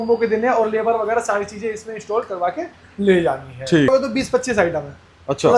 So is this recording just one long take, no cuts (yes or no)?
no